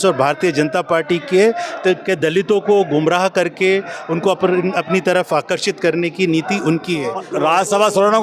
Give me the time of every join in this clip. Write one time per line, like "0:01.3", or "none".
0:07.3